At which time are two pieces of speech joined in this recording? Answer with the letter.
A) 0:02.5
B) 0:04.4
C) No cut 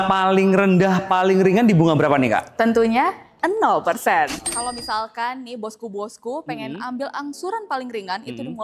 B